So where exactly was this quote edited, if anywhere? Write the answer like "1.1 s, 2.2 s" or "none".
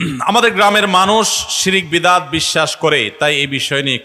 none